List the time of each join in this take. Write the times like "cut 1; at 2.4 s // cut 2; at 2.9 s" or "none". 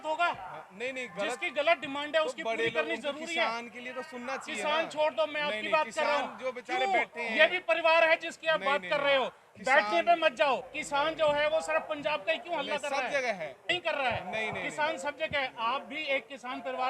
cut 1; at 10.8 s // cut 2; at 13.6 s